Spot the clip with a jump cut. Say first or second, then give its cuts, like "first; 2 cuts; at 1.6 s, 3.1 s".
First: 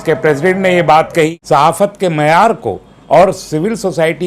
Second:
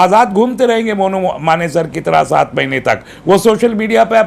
first; 1 cut; at 1.4 s